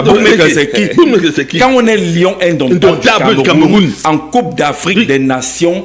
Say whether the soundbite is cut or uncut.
uncut